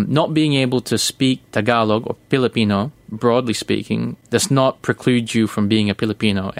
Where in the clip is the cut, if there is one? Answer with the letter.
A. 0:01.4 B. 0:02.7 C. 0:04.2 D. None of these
C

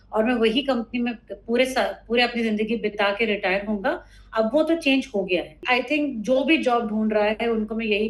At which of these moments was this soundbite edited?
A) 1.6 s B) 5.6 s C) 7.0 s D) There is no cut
B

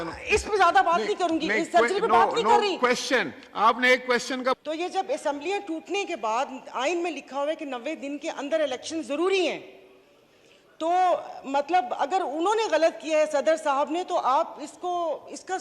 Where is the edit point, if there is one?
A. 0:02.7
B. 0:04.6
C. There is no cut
B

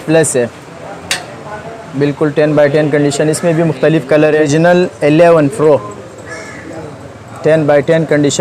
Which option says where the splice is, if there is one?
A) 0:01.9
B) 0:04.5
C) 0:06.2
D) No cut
B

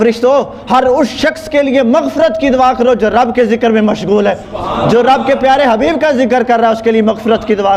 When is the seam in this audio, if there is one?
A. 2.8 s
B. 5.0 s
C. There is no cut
C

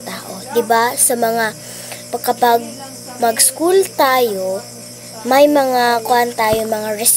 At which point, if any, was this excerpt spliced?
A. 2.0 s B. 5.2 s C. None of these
C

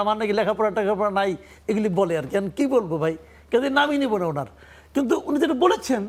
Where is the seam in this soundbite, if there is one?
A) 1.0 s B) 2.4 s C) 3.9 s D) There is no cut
D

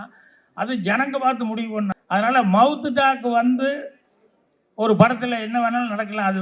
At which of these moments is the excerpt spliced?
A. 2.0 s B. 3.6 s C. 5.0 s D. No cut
A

